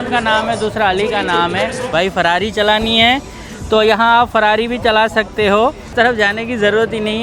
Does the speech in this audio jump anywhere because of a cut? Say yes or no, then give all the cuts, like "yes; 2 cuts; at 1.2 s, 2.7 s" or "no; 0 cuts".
yes; 2 cuts; at 1.8 s, 5.8 s